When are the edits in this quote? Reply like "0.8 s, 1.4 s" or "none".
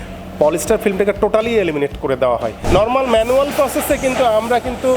2.6 s